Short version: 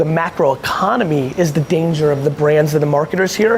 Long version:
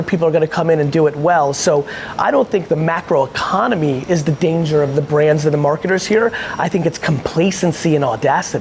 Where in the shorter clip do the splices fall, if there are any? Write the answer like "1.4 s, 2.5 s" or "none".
none